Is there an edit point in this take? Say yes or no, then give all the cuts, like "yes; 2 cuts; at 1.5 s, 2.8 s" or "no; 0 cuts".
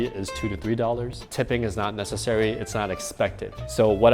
yes; 1 cut; at 1.2 s